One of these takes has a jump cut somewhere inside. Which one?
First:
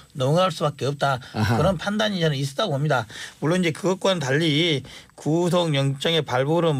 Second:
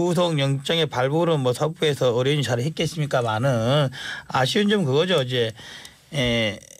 second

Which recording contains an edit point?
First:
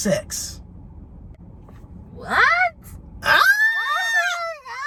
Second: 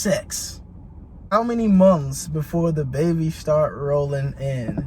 second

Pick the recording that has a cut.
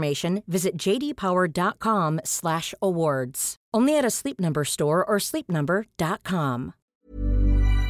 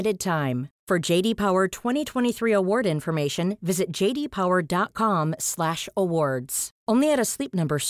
first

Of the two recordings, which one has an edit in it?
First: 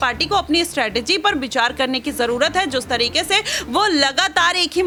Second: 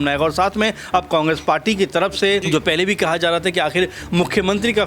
second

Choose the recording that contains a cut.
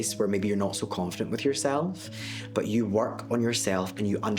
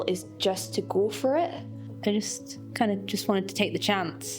second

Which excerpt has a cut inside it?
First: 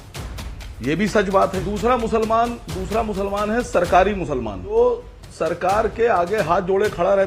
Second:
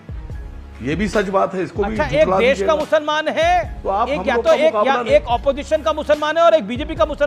first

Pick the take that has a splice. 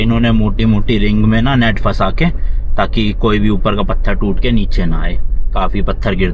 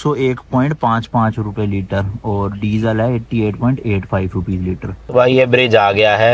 second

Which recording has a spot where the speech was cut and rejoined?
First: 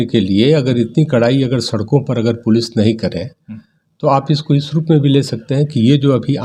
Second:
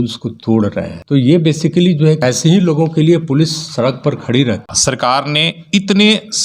second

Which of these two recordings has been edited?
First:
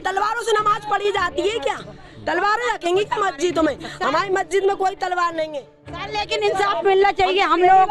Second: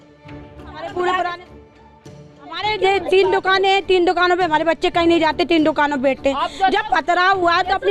first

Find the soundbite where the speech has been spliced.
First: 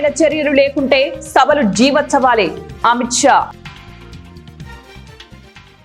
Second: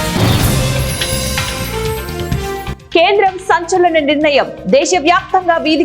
second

